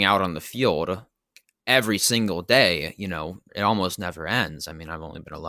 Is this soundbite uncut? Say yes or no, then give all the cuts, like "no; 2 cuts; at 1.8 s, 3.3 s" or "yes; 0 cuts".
no; 2 cuts; at 1.2 s, 3.0 s